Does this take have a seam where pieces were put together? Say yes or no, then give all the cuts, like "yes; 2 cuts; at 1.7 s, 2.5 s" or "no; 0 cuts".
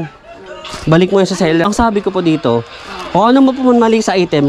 yes; 1 cut; at 1.6 s